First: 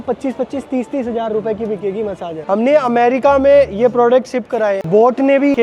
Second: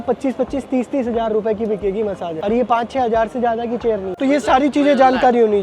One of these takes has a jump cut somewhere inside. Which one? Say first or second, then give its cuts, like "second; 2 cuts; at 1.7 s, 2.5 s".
first; 2 cuts; at 2.4 s, 4.8 s